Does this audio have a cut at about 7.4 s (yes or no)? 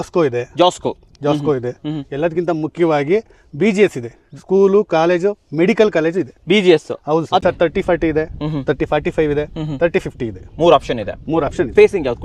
yes